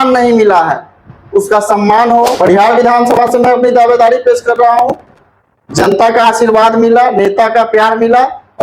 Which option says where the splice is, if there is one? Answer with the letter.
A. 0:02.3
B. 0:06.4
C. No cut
A